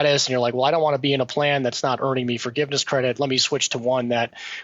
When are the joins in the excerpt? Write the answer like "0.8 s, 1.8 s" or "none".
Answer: none